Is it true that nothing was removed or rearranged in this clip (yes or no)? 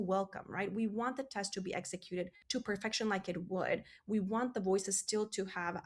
no